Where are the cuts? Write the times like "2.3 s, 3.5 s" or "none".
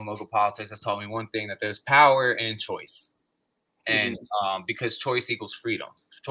none